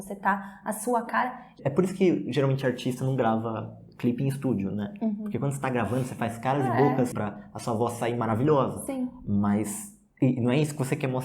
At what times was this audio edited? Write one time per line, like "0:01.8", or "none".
0:01.6
0:07.2